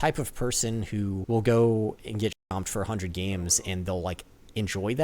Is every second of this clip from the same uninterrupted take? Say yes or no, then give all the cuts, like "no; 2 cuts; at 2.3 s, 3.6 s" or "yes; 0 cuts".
no; 2 cuts; at 1.2 s, 2.4 s